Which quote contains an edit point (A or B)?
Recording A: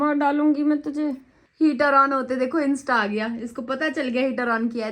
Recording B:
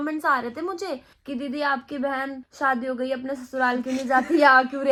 A